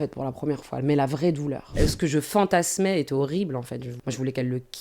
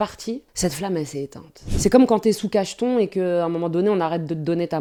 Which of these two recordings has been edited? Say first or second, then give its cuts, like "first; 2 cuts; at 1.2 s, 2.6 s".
first; 2 cuts; at 1.8 s, 3.9 s